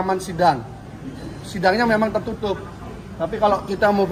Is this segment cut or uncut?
uncut